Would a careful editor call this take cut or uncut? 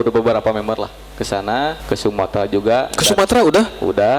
cut